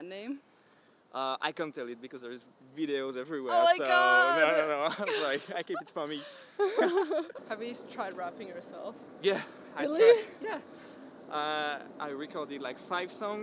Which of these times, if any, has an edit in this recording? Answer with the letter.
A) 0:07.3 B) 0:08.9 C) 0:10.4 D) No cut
A